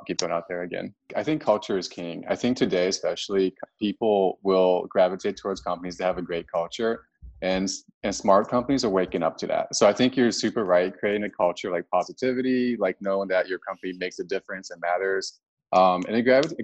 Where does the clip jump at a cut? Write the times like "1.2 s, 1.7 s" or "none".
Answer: 1.1 s